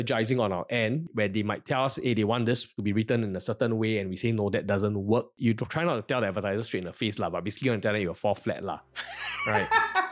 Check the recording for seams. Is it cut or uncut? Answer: uncut